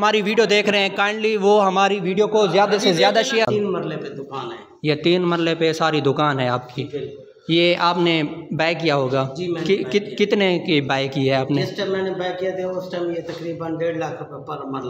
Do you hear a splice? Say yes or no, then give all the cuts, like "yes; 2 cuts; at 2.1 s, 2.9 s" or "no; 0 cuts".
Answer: yes; 1 cut; at 3.5 s